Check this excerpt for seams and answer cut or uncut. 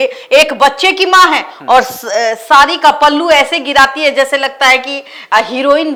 uncut